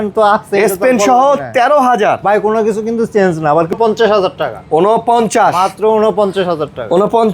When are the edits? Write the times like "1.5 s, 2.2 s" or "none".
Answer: 3.7 s